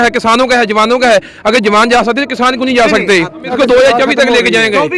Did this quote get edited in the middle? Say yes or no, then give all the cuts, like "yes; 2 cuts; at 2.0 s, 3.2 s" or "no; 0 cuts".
yes; 1 cut; at 3.5 s